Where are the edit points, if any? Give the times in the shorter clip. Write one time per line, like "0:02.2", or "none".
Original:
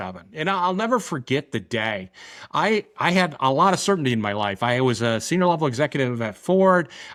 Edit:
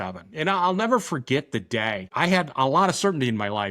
0:02.1